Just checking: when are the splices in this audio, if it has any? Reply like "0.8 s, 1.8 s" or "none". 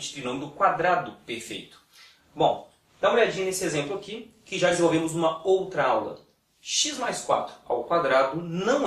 4.7 s